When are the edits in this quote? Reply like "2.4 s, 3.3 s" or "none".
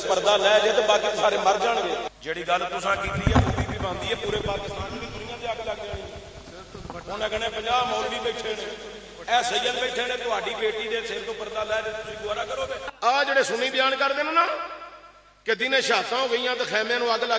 2.1 s, 12.9 s